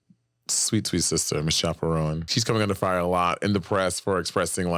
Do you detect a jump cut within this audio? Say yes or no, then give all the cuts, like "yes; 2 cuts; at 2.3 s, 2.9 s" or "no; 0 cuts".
yes; 1 cut; at 2.3 s